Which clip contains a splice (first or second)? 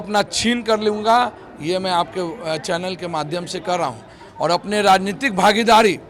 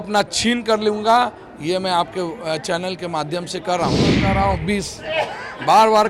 second